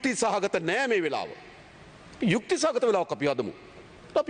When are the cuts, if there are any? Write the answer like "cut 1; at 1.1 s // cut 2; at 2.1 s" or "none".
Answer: none